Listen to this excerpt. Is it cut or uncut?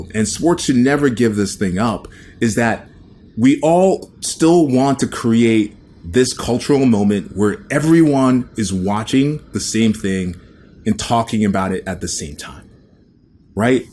uncut